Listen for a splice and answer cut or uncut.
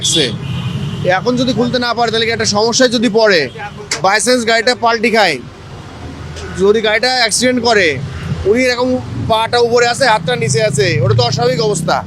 uncut